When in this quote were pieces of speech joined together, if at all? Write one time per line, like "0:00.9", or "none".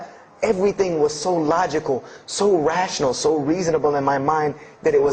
none